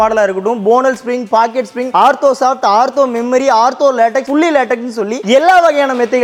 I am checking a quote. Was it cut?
no; 0 cuts

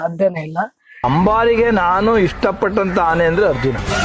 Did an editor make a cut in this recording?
yes; 1 cut; at 1.0 s

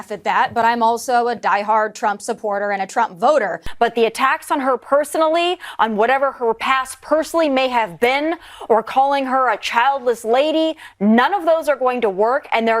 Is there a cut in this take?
yes; 1 cut; at 3.6 s

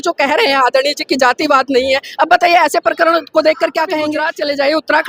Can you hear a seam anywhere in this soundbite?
yes; 1 cut; at 4.2 s

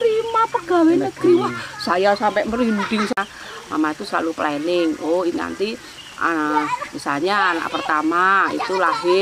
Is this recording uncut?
no; 1 cut; at 3.1 s

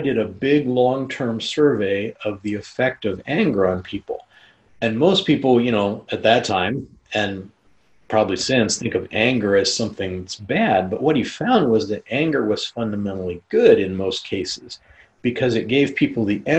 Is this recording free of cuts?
yes; 0 cuts

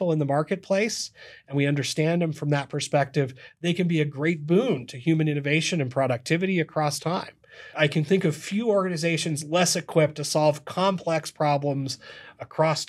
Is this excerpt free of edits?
no; 1 cut; at 7.7 s

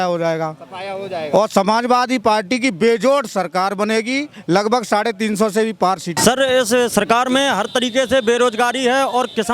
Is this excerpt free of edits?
no; 1 cut; at 6.2 s

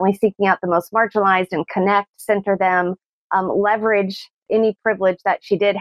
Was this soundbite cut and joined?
yes; 1 cut; at 4.4 s

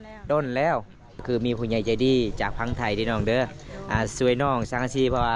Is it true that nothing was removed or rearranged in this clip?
no; 1 cut; at 1.1 s

